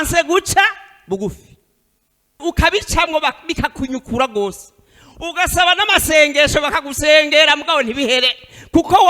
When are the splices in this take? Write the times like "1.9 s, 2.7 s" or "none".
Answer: 2.4 s